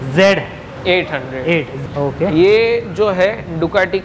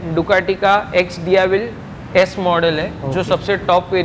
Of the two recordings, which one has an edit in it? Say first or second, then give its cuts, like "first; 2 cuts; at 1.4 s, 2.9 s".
first; 1 cut; at 1.8 s